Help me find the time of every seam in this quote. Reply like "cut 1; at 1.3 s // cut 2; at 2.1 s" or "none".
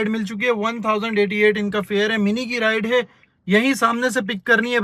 none